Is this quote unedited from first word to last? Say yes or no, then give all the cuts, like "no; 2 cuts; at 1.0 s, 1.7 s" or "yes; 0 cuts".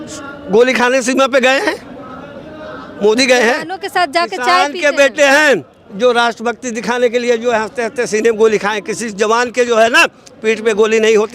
yes; 0 cuts